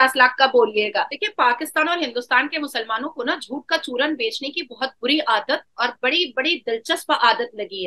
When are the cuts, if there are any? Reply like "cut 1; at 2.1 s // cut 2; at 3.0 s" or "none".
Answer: cut 1; at 1.2 s